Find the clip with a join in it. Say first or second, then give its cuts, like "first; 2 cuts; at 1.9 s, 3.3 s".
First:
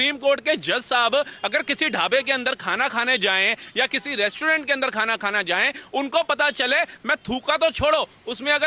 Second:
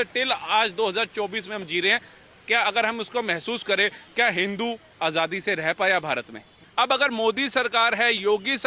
second; 1 cut; at 6.7 s